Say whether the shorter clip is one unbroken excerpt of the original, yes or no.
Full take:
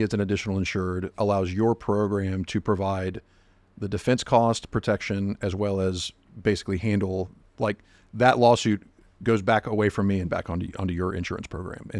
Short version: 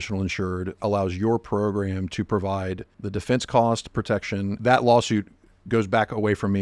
no